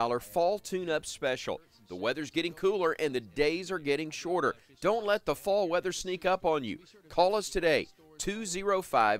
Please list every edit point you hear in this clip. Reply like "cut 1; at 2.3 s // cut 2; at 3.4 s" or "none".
cut 1; at 1.7 s